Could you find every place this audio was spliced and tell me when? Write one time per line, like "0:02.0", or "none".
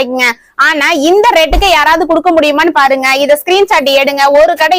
none